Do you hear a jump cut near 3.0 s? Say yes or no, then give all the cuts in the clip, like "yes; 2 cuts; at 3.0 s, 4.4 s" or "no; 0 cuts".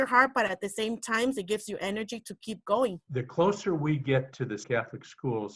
yes; 2 cuts; at 3.0 s, 4.6 s